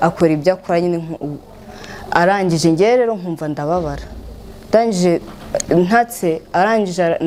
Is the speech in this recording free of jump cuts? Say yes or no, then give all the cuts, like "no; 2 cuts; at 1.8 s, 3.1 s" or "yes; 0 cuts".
yes; 0 cuts